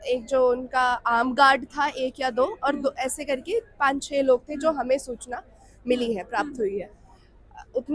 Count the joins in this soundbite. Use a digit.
0